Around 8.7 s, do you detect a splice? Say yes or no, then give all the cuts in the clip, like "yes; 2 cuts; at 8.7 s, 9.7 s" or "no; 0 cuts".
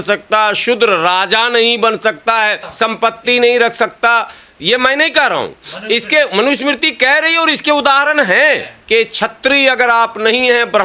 yes; 1 cut; at 8.7 s